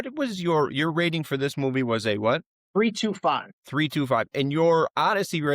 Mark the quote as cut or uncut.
cut